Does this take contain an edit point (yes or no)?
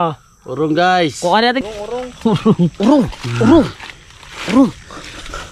yes